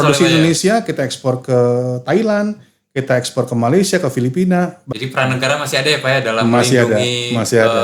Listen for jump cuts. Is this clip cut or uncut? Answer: cut